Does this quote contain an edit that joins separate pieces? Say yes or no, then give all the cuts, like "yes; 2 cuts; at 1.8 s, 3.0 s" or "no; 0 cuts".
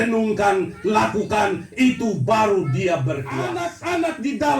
yes; 1 cut; at 3.5 s